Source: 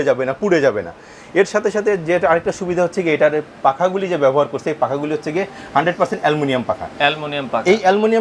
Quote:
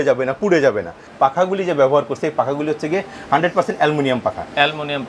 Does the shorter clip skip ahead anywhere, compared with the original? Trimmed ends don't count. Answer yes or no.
yes